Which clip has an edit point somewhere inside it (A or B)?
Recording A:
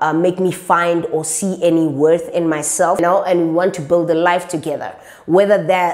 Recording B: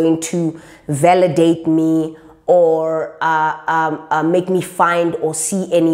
A